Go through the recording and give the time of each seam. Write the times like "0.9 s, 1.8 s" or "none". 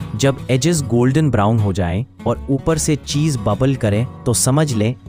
none